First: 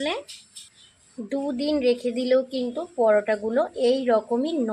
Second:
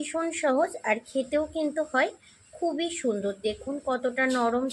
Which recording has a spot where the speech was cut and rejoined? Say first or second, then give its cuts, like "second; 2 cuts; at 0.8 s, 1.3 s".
first; 1 cut; at 1.1 s